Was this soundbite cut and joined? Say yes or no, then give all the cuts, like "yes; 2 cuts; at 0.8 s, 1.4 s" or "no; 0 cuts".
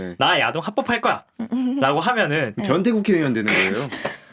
no; 0 cuts